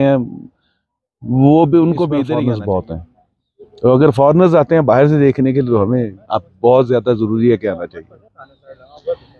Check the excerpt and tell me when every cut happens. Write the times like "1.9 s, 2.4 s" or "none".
2.3 s